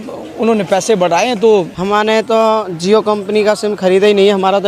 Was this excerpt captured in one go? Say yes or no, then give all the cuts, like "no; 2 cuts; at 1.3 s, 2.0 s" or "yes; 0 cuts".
no; 1 cut; at 1.8 s